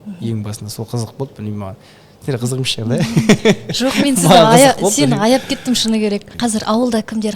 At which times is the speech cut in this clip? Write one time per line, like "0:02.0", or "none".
0:06.3